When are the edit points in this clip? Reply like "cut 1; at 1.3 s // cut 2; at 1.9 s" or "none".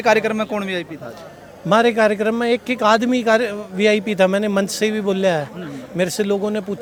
none